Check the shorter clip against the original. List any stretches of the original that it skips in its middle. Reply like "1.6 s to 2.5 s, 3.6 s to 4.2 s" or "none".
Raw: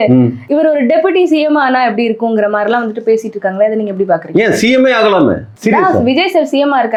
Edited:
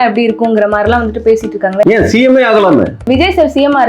3.7 s to 4.3 s, 5.6 s to 6.0 s